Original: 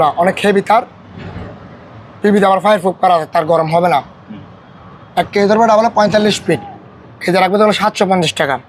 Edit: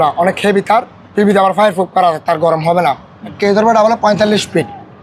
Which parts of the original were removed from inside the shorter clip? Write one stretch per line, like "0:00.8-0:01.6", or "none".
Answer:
0:01.0-0:02.1
0:04.4-0:05.3